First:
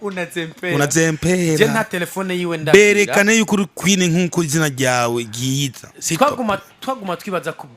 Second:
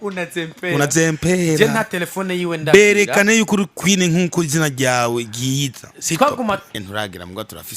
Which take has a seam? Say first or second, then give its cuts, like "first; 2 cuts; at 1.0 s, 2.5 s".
second; 1 cut; at 6.8 s